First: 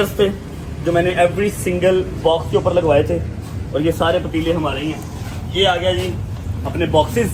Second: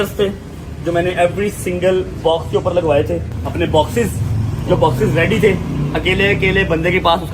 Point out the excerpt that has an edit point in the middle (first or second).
second